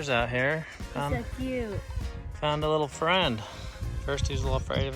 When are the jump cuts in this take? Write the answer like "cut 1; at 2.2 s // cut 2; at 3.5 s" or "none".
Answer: none

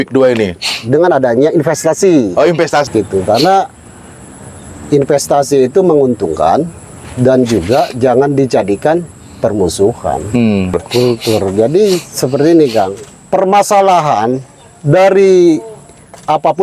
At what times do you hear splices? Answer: cut 1; at 2.9 s // cut 2; at 10.8 s

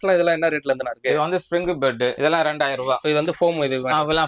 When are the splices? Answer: cut 1; at 2.2 s // cut 2; at 3.0 s

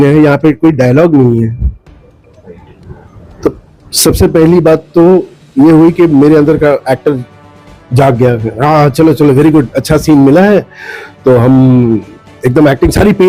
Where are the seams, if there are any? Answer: none

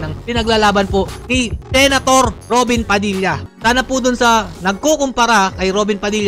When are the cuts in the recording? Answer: cut 1; at 3.4 s

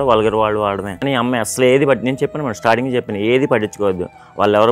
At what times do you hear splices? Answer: cut 1; at 1.0 s

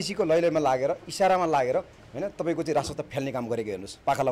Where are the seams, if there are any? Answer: none

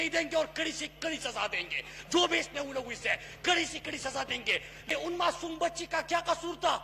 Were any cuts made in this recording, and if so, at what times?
cut 1; at 4.9 s

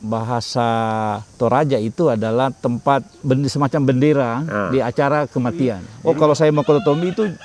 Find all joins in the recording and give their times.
cut 1; at 1.3 s // cut 2; at 3.2 s // cut 3; at 5.9 s

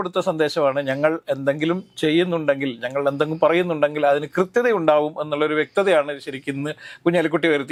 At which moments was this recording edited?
none

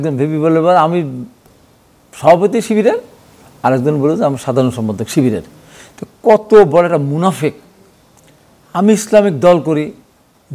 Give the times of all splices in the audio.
none

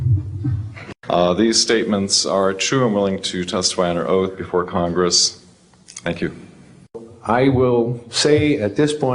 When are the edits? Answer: cut 1; at 0.8 s // cut 2; at 7.0 s

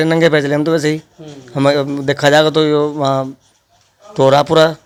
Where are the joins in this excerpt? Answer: none

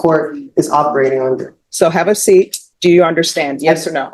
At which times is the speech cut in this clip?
cut 1; at 1.6 s // cut 2; at 2.6 s

